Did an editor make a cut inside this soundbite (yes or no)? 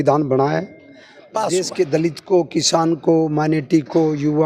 yes